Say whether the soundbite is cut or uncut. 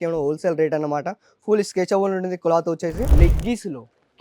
cut